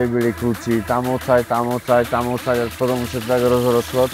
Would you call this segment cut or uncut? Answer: uncut